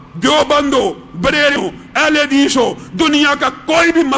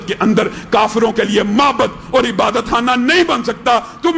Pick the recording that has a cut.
first; 1 cut; at 1.6 s

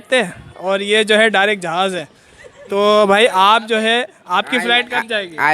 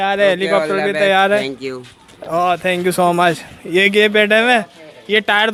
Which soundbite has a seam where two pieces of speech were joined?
first; 1 cut; at 2.4 s

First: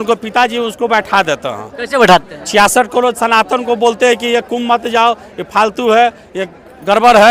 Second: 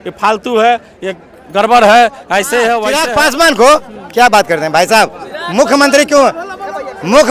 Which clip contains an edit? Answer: second; 1 cut; at 2.9 s

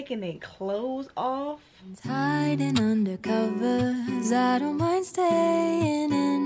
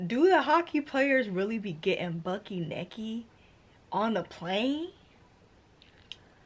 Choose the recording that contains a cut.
first; 1 cut; at 2.0 s

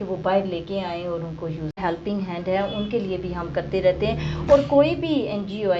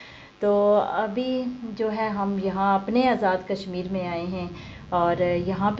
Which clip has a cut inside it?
first; 1 cut; at 1.8 s

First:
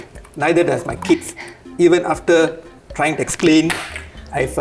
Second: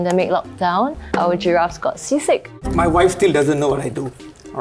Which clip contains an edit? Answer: second; 2 cuts; at 1.0 s, 2.6 s

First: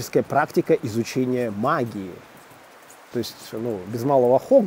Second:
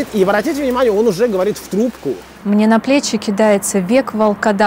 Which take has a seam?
second; 1 cut; at 2.3 s

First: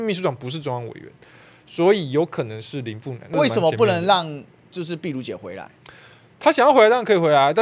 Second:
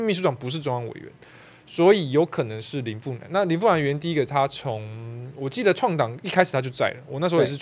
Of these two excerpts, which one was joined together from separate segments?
first; 1 cut; at 3.3 s

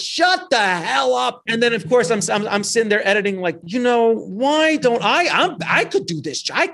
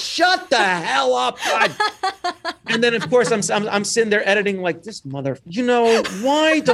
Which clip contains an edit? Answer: first; 2 cuts; at 1.4 s, 3.6 s

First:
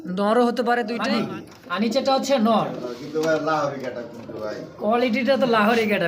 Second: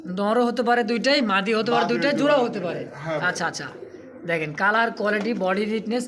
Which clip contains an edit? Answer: first; 1 cut; at 1.0 s

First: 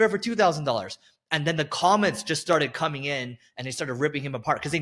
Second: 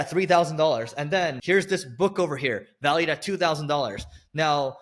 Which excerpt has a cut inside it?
second; 1 cut; at 1.4 s

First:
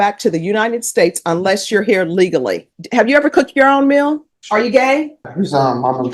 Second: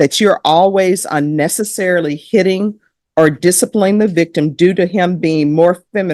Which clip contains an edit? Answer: first; 3 cuts; at 2.7 s, 4.3 s, 5.3 s

